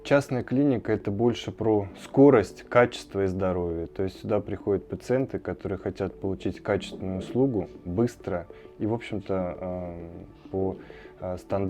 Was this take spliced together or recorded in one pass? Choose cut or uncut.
uncut